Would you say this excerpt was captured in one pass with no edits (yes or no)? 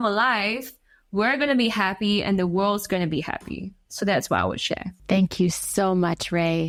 yes